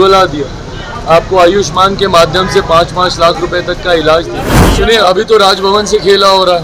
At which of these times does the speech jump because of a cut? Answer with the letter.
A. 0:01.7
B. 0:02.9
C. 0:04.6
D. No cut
C